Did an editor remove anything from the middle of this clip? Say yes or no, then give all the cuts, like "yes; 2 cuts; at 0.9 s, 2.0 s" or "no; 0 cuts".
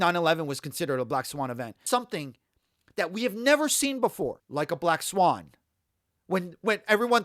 yes; 2 cuts; at 1.7 s, 4.4 s